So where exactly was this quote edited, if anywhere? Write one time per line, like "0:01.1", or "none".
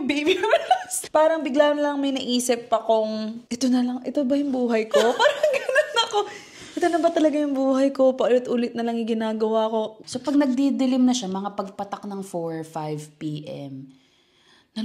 0:00.9
0:03.4
0:10.0